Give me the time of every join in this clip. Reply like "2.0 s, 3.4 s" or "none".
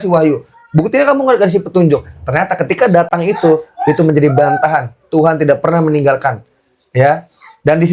none